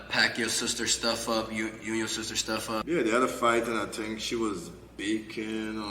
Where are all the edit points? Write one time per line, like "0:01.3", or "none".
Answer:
0:02.8